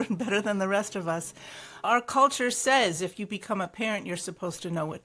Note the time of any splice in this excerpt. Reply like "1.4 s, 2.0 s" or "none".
1.8 s